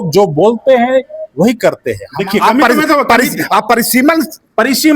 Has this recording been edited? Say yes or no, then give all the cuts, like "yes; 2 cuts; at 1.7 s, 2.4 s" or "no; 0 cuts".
yes; 1 cut; at 2.0 s